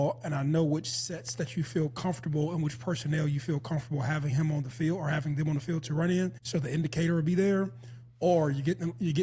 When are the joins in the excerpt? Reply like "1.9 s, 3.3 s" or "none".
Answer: 6.4 s